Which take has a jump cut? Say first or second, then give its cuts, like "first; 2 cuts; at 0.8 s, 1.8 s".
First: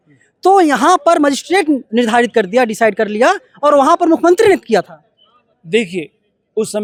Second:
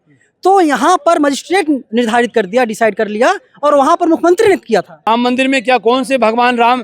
second; 1 cut; at 5.1 s